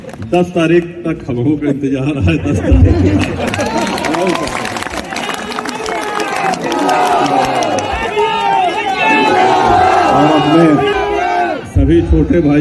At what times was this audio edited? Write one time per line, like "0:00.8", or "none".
0:10.9